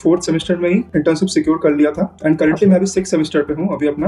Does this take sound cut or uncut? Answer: uncut